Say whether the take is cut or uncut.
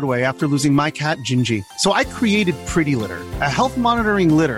uncut